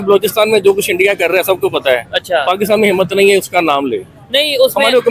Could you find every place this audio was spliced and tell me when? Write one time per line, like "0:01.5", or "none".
none